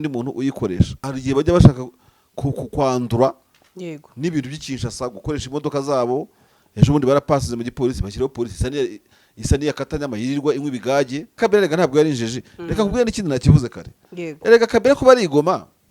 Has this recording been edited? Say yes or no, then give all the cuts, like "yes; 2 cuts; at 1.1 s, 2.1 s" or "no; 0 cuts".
yes; 2 cuts; at 1.1 s, 11.4 s